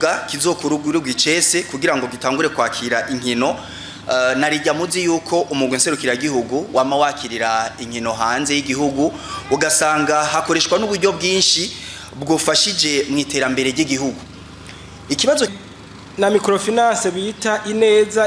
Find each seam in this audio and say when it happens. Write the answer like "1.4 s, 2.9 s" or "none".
15.5 s